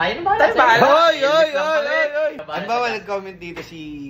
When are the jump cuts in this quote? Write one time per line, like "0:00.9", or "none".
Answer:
0:02.4